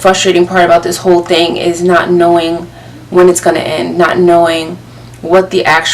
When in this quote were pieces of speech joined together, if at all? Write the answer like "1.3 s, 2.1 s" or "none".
none